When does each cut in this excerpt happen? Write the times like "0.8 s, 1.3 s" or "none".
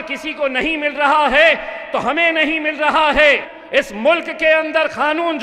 3.5 s